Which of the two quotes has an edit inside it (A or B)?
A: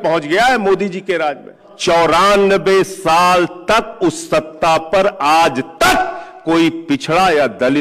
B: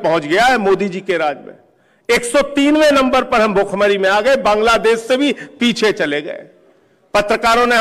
A